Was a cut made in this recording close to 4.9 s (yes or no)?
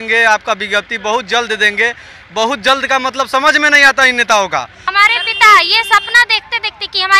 yes